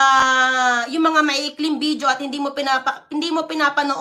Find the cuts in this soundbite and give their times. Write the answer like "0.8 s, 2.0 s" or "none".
none